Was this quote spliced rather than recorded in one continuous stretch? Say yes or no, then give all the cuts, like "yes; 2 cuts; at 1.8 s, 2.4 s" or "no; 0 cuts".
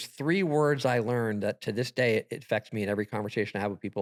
no; 0 cuts